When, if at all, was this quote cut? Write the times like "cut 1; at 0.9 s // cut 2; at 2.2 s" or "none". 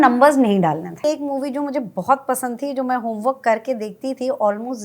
cut 1; at 1.0 s